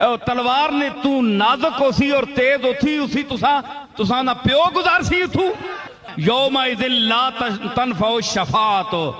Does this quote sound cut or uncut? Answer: cut